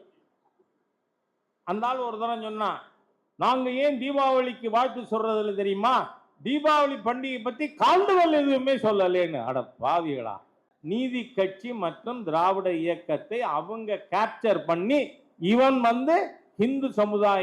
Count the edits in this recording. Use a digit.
1